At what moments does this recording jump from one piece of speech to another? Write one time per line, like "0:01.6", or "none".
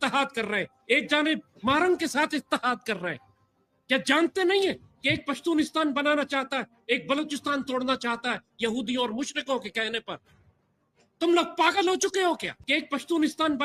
0:12.6